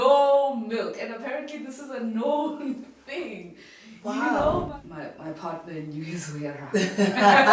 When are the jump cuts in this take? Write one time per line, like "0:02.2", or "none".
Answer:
0:04.7